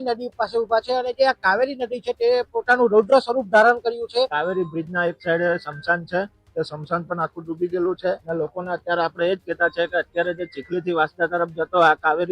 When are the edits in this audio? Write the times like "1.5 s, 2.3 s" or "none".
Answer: 4.3 s, 8.2 s